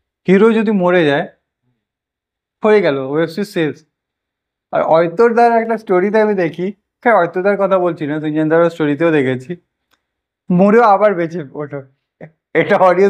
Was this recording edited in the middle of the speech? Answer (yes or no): no